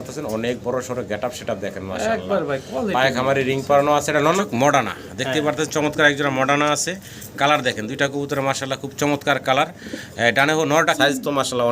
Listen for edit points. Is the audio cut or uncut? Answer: cut